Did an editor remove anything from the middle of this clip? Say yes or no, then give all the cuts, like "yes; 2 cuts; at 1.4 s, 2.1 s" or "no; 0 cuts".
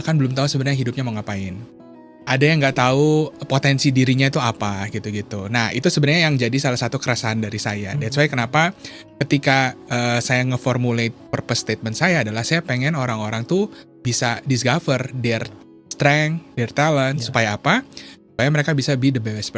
no; 0 cuts